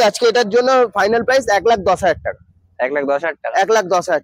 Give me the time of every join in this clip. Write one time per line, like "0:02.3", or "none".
none